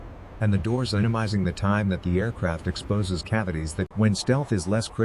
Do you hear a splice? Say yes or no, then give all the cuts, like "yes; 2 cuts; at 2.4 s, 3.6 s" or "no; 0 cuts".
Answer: yes; 1 cut; at 3.9 s